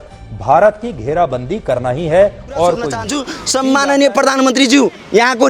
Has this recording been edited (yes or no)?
yes